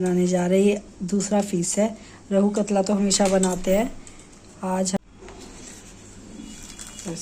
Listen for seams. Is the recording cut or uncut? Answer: cut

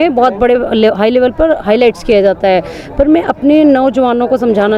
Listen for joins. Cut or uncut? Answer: uncut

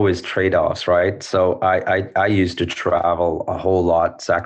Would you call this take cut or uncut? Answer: uncut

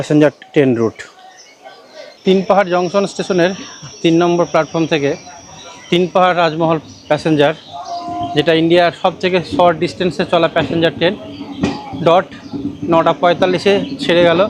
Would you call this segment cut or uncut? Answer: uncut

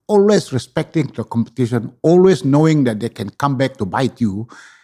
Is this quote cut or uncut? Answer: uncut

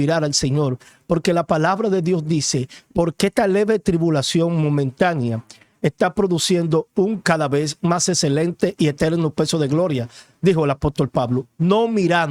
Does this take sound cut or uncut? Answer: uncut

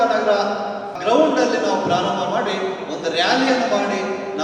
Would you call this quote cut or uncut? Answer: cut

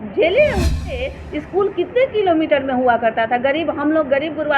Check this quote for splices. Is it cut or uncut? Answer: cut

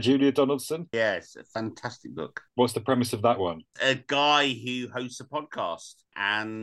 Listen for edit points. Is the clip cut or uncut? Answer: cut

